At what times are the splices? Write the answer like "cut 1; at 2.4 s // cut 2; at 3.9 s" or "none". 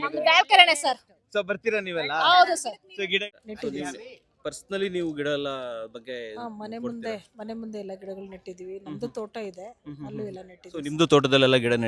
cut 1; at 3.2 s

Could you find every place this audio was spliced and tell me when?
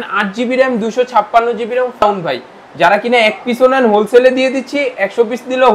cut 1; at 2.0 s

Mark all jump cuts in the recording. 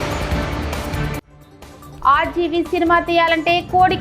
cut 1; at 1.3 s

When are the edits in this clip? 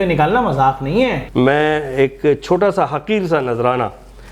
cut 1; at 1.2 s

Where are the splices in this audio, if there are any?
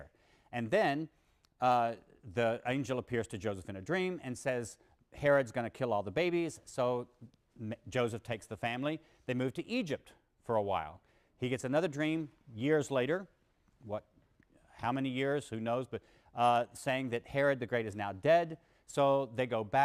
none

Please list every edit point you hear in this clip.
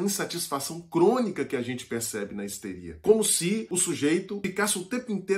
cut 1; at 3.0 s // cut 2; at 3.7 s // cut 3; at 4.4 s

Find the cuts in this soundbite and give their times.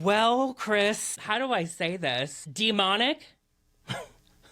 cut 1; at 2.4 s

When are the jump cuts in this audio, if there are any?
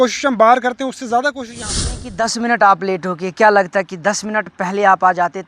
cut 1; at 2.0 s

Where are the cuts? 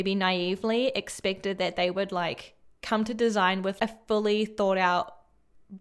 cut 1; at 3.7 s

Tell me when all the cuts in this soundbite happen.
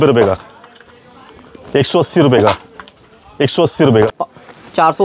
cut 1; at 4.1 s

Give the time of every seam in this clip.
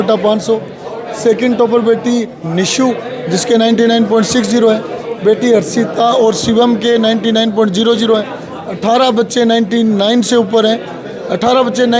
none

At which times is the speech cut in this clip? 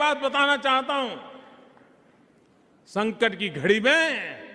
none

